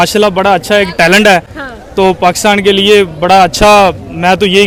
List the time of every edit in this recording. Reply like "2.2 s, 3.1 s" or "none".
none